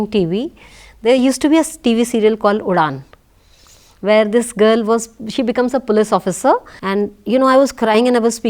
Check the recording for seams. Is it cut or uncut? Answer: cut